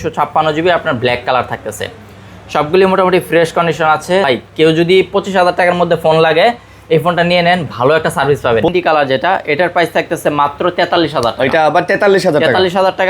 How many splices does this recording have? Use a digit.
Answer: 2